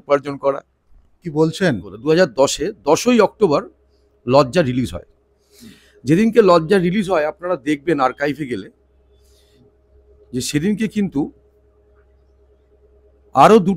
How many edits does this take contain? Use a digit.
1